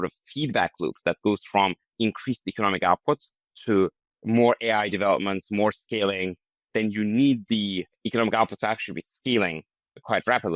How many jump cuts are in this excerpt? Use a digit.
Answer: 2